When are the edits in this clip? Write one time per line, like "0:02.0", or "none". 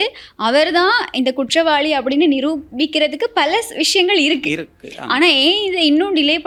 none